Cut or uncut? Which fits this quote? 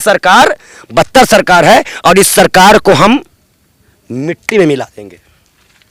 uncut